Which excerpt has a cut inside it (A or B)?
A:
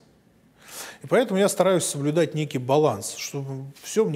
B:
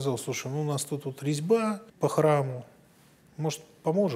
B